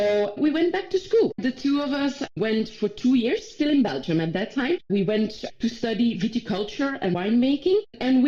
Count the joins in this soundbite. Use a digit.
0